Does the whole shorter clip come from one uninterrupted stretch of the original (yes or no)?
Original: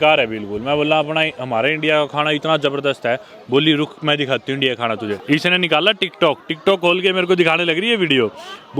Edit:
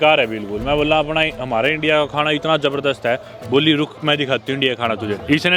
yes